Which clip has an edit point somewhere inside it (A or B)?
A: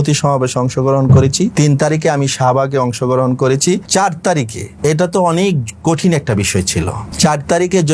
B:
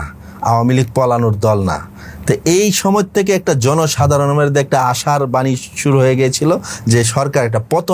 A